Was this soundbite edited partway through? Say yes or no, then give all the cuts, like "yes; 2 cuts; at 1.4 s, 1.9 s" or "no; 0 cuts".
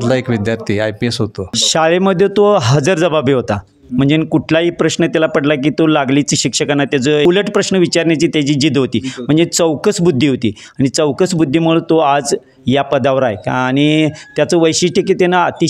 yes; 2 cuts; at 1.6 s, 7.2 s